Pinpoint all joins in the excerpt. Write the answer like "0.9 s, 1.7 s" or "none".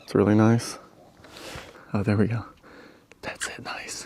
1.7 s